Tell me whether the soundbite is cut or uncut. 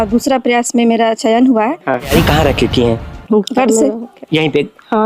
cut